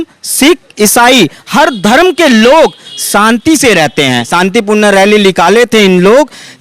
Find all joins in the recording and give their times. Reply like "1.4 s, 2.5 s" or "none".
4.3 s